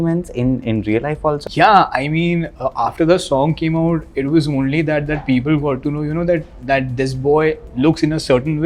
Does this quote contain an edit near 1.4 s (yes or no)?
yes